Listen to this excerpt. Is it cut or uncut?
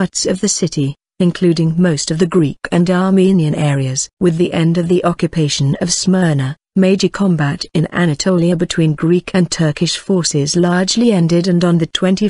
uncut